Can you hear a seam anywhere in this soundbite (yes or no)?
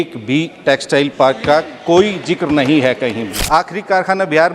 yes